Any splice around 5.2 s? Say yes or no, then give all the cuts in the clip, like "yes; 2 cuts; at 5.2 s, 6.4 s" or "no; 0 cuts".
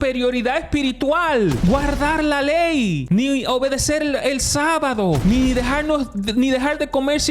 yes; 3 cuts; at 1.6 s, 3.0 s, 5.2 s